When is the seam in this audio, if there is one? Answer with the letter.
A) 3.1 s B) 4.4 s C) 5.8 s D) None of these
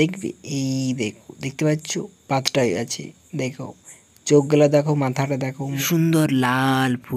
C